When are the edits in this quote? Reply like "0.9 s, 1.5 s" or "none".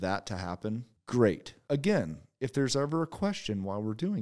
0.9 s, 1.5 s